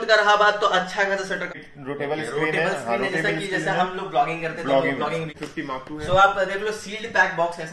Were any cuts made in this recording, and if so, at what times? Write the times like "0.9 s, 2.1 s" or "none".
1.5 s, 5.9 s